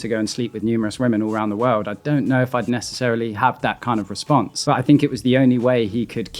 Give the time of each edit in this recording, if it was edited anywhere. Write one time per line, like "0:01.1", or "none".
0:04.6